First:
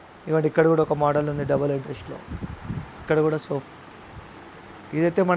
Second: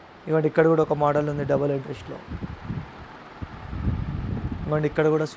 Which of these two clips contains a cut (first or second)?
first